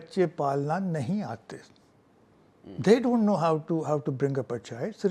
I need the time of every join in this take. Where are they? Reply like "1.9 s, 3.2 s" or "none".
none